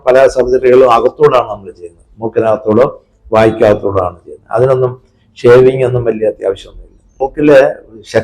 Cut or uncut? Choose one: cut